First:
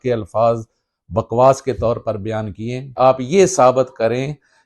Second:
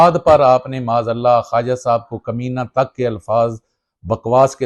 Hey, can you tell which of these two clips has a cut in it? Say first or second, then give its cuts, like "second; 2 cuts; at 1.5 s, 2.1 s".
first; 1 cut; at 2.9 s